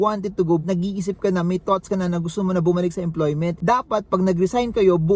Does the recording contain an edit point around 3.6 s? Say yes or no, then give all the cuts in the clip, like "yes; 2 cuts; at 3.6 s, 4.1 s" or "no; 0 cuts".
yes; 1 cut; at 3.6 s